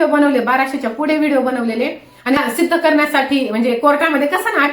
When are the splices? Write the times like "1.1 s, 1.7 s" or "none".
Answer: 2.4 s